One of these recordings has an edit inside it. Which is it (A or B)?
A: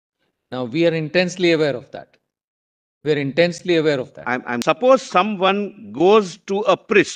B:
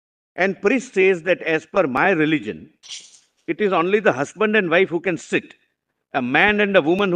A